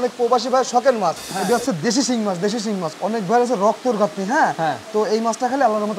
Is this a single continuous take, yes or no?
no